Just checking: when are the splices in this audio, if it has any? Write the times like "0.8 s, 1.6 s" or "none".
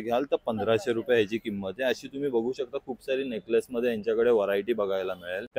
none